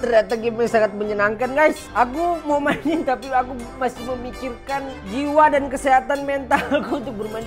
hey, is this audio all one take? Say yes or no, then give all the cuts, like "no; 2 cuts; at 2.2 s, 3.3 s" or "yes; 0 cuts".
yes; 0 cuts